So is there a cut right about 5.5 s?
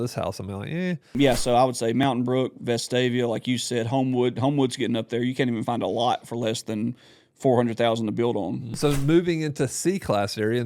no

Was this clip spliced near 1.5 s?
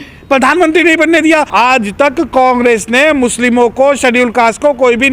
yes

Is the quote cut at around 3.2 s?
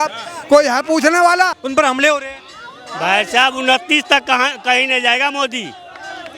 no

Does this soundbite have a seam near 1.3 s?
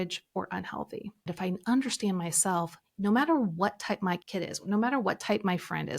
yes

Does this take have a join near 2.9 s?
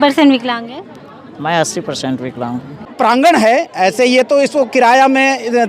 yes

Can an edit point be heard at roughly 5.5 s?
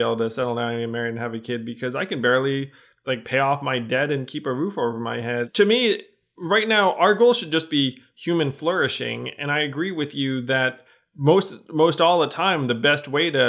yes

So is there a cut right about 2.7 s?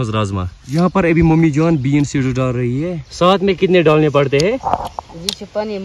yes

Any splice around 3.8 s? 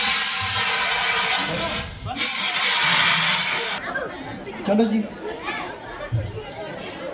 yes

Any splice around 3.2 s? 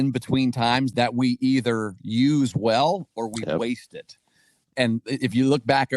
no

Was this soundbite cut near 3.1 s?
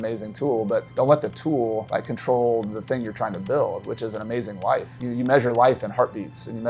no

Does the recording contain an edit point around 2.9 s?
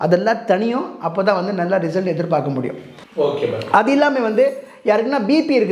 no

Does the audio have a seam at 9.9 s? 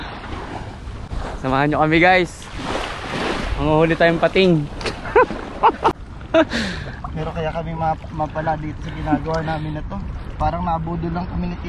no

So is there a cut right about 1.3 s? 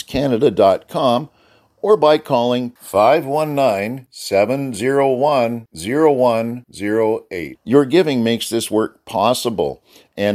no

